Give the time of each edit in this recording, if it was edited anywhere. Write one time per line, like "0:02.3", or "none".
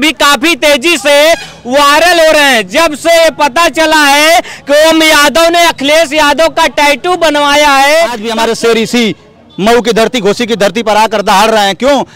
0:08.2